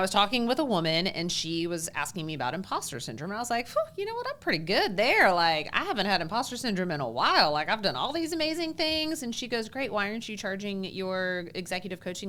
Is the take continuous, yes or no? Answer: yes